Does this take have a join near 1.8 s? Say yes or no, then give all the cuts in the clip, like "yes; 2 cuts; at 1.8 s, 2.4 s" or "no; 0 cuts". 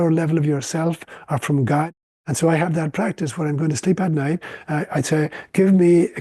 yes; 1 cut; at 1.8 s